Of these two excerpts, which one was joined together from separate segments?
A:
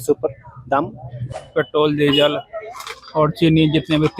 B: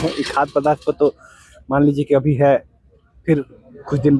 A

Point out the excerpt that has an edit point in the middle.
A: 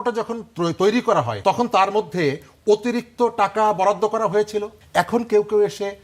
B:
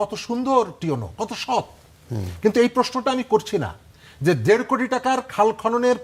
A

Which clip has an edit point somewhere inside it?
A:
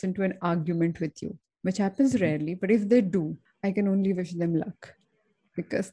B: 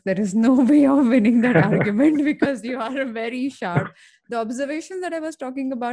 A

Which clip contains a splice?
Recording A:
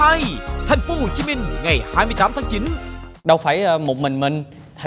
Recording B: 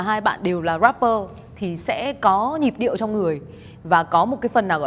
A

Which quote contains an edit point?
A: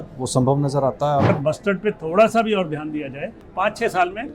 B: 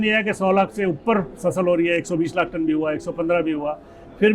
A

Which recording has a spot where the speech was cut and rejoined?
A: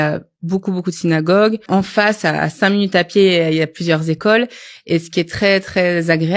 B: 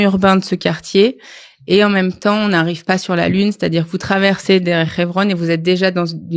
A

